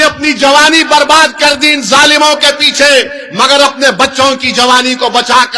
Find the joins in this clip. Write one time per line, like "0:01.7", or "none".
none

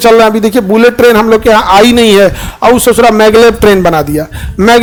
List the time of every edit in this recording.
none

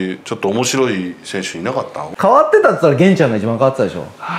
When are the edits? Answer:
0:02.0

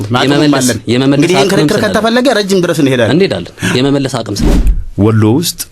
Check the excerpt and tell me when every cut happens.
0:04.4

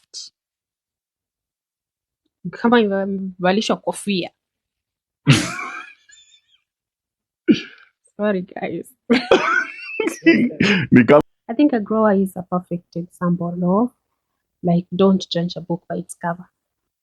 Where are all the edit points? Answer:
0:11.2

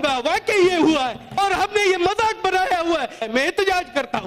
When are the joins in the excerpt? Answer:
0:01.4
0:03.2

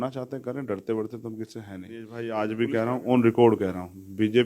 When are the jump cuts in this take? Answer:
0:02.2

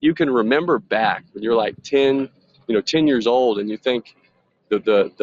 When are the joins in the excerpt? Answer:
none

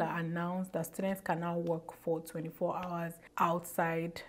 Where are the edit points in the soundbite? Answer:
0:03.2

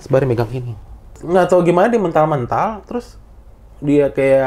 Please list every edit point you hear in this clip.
0:01.2

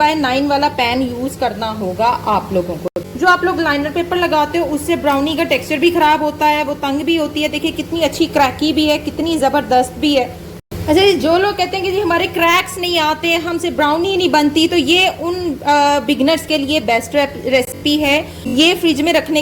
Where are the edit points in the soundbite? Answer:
0:02.9
0:10.5
0:18.0

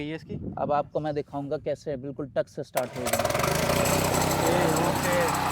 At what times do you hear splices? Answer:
none

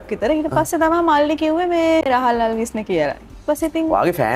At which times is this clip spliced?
0:02.0

